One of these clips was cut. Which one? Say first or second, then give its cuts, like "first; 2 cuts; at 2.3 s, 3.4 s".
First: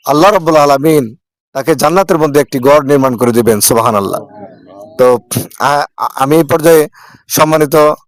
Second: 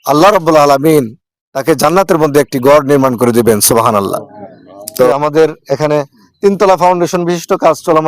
second; 1 cut; at 5.1 s